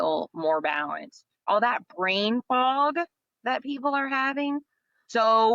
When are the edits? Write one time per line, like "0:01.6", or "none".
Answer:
0:01.4
0:04.6